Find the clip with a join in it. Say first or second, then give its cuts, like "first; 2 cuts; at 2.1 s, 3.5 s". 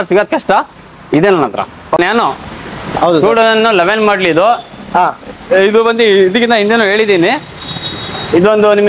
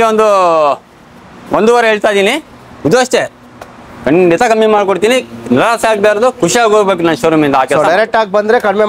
first; 1 cut; at 2.0 s